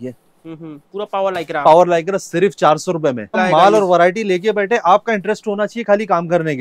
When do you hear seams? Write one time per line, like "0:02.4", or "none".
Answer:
0:03.4